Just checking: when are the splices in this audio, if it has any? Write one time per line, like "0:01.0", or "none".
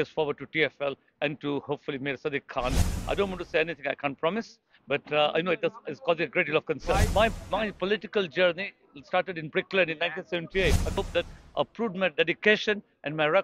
0:02.9
0:07.1
0:11.0